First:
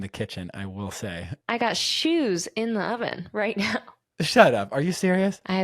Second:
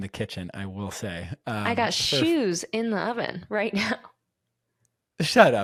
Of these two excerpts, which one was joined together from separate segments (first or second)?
first